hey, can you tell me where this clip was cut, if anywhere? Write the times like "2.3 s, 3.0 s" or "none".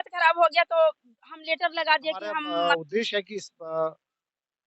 2.5 s